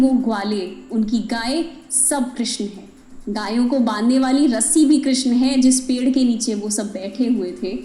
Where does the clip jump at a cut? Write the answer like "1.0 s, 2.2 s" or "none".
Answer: none